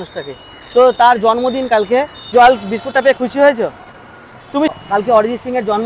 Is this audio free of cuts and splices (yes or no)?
no